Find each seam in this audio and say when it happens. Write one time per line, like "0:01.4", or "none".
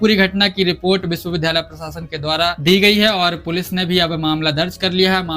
0:02.7